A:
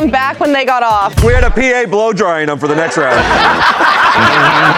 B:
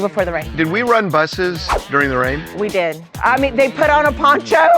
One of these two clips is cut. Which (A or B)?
B